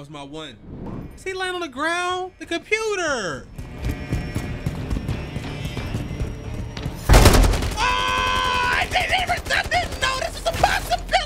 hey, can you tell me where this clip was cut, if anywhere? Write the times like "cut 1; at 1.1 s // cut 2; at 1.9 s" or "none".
cut 1; at 1.0 s